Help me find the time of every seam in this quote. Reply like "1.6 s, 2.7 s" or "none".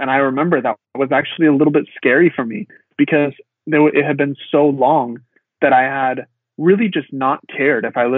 none